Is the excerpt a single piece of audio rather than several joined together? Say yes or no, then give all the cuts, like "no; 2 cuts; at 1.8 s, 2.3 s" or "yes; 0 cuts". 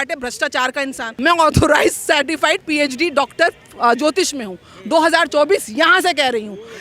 no; 1 cut; at 1.0 s